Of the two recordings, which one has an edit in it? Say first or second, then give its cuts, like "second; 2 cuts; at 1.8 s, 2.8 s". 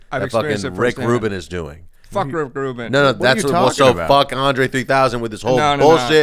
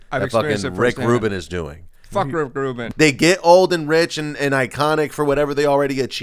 second; 1 cut; at 2.8 s